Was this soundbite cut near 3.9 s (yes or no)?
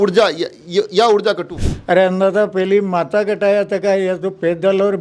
no